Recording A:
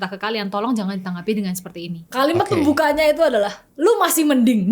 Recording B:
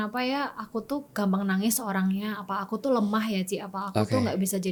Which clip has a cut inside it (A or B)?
A